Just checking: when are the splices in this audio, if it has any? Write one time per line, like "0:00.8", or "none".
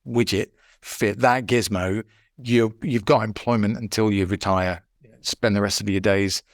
0:04.9